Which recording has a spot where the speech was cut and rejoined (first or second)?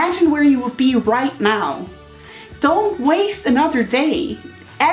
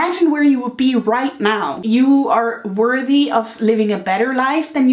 second